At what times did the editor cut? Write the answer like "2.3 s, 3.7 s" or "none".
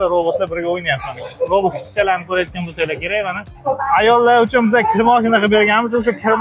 3.5 s